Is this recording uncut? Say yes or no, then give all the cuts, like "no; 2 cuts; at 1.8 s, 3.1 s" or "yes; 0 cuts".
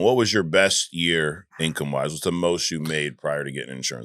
yes; 0 cuts